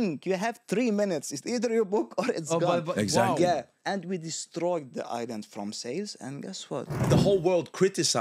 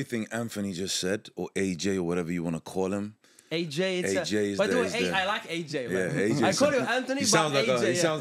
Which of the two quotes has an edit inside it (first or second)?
first